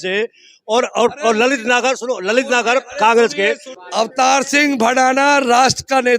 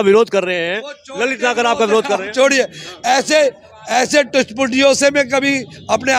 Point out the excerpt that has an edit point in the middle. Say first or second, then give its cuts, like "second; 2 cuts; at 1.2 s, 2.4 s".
first; 1 cut; at 3.7 s